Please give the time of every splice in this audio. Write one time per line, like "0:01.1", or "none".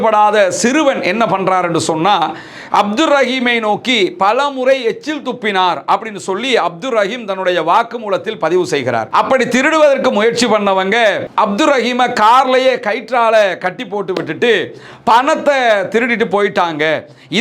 0:09.1